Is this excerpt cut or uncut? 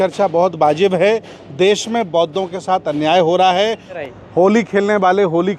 cut